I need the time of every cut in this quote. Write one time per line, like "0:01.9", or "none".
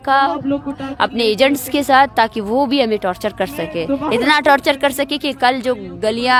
none